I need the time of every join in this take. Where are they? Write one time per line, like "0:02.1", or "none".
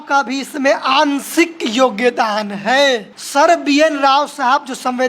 0:03.1